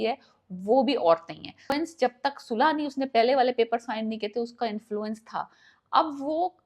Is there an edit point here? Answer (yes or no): yes